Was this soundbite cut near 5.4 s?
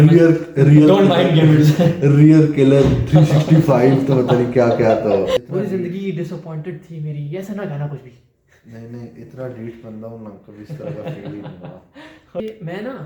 yes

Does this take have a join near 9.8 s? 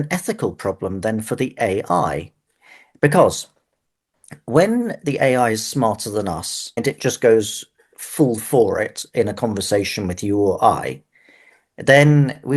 no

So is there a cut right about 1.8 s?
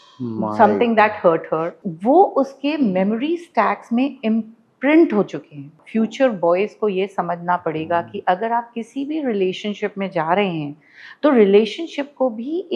yes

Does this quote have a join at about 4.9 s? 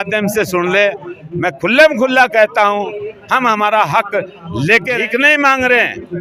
yes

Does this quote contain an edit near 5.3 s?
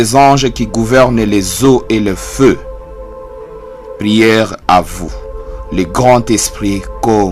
no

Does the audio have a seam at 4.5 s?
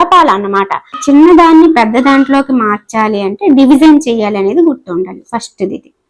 no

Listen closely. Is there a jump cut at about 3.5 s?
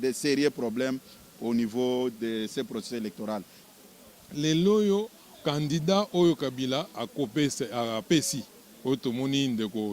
yes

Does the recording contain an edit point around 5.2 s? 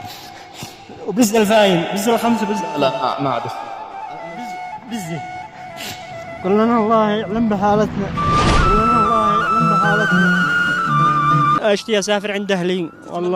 no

